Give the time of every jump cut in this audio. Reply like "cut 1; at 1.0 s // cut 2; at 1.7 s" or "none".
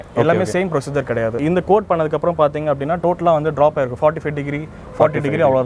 cut 1; at 1.4 s